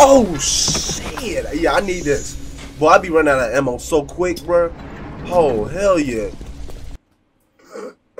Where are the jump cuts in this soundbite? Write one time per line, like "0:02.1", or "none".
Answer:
none